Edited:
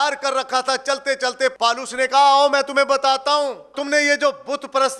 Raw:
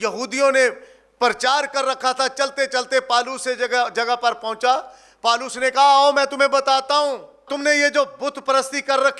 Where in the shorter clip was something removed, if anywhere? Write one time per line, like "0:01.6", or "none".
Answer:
0:01.5
0:03.7